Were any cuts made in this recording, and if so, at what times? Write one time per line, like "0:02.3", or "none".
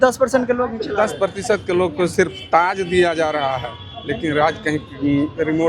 none